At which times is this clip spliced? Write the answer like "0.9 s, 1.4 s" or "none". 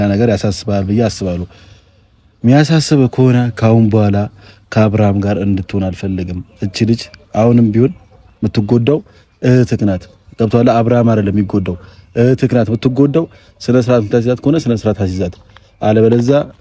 none